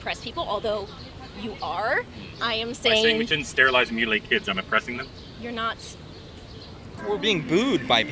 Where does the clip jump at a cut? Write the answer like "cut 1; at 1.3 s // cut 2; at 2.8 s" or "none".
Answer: cut 1; at 7.0 s